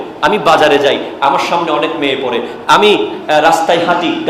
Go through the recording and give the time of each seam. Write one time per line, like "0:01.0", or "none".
none